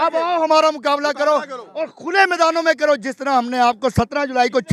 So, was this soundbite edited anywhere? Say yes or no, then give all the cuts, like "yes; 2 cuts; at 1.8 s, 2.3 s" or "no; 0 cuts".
no; 0 cuts